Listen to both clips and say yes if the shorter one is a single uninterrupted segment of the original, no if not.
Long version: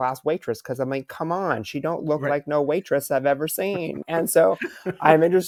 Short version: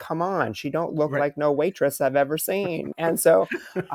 yes